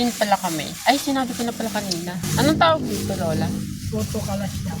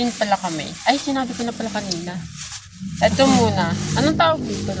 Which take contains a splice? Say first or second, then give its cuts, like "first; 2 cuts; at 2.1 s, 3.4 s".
first; 1 cut; at 2.2 s